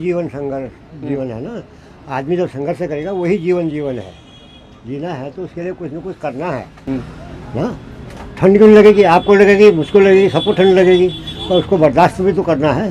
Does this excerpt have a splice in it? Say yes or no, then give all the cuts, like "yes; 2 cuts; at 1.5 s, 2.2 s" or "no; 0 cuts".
no; 0 cuts